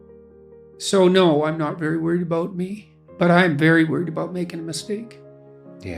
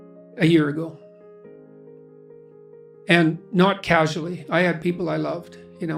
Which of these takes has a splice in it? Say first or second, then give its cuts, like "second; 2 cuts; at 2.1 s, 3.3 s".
first; 1 cut; at 0.9 s